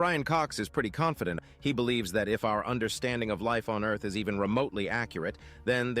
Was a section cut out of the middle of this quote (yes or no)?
yes